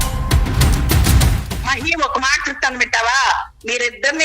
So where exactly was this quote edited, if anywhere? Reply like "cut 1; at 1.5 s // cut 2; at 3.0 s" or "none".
cut 1; at 1.1 s